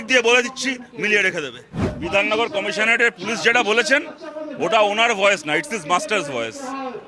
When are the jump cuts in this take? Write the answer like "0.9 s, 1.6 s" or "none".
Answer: none